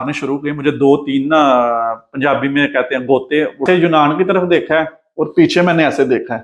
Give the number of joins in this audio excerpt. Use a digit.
1